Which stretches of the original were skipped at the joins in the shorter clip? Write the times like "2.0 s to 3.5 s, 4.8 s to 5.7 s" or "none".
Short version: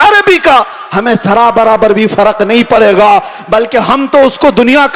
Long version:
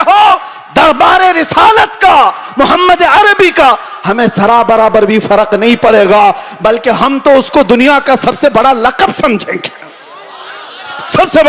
none

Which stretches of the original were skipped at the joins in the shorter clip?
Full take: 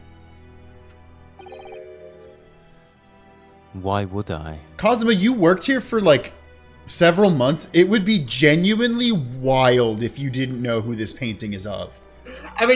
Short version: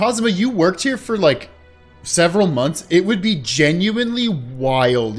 none

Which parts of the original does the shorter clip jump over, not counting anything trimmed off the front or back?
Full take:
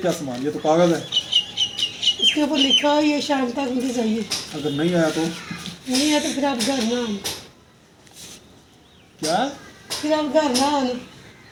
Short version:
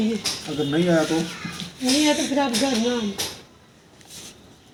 none

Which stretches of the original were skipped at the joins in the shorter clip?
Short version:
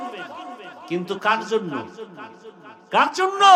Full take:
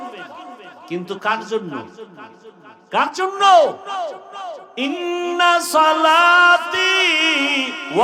none

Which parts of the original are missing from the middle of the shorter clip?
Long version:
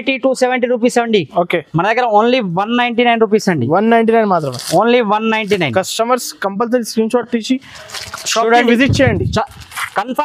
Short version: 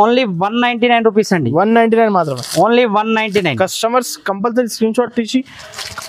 none

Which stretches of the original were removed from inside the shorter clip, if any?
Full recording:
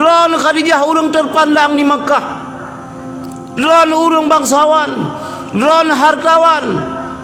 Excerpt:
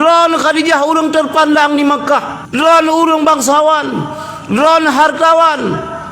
2.4 s to 3.4 s

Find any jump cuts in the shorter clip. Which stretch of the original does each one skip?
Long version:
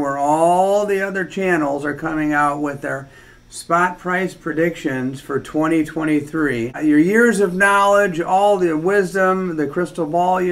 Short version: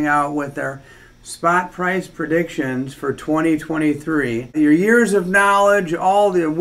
none

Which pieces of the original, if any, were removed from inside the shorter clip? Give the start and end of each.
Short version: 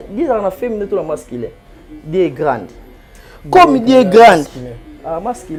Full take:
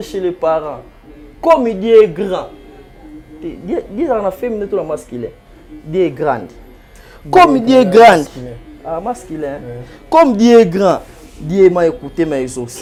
none

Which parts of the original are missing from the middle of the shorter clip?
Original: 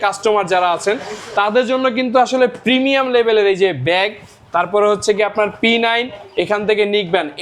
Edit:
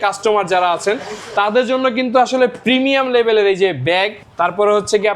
4.2 s to 4.4 s

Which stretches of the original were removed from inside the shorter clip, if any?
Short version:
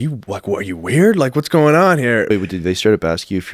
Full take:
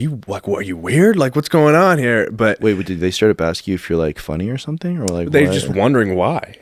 2.3 s to 2.6 s

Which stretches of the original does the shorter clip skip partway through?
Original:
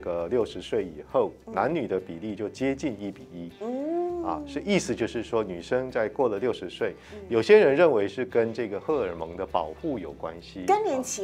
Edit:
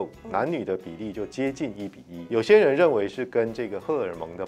3.3 s to 7.1 s

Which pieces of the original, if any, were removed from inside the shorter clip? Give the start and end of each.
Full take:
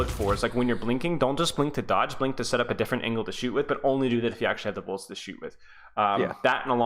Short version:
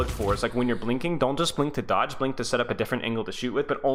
none

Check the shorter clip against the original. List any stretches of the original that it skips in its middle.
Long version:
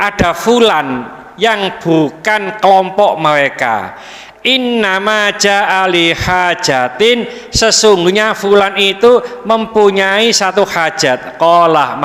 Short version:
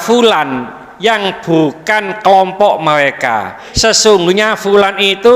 4.0 s to 7.4 s

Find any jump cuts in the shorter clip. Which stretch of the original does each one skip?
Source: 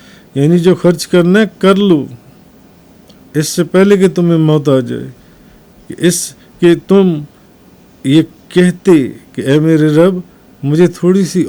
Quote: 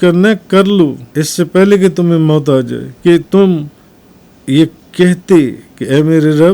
2.1 s to 3.2 s, 5.0 s to 6.4 s

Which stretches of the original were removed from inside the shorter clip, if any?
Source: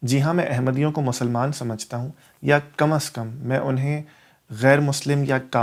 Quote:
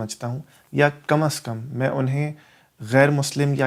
none

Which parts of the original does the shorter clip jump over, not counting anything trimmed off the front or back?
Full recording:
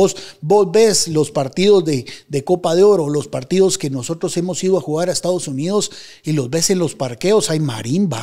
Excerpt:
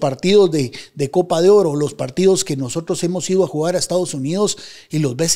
none

